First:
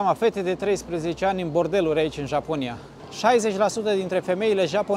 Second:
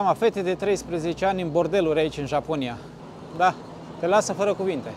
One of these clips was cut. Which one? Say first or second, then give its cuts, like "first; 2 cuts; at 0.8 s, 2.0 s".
first; 1 cut; at 3.0 s